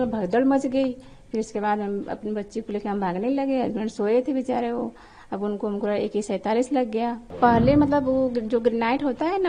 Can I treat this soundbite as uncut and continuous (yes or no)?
no